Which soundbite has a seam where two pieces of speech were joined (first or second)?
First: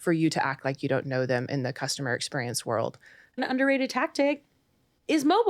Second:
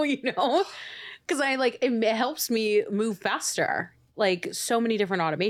first